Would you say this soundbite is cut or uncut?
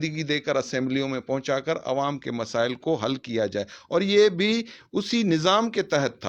uncut